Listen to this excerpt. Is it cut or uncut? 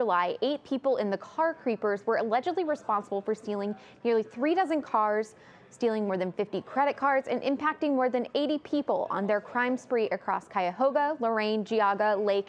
uncut